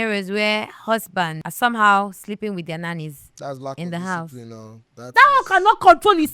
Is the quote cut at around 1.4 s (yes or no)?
yes